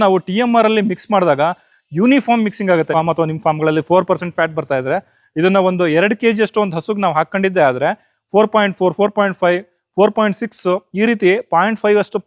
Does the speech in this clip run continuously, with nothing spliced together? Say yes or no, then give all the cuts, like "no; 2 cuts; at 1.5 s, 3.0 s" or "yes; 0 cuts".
no; 1 cut; at 2.9 s